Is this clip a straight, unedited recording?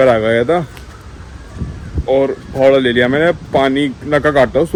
yes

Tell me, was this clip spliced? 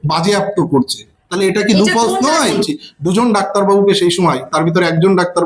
yes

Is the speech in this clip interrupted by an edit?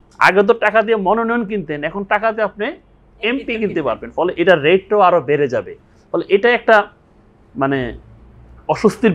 no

